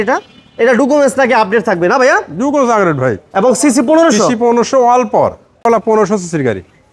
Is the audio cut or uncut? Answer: cut